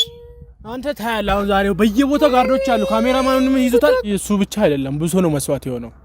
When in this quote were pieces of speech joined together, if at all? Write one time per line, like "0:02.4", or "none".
0:04.1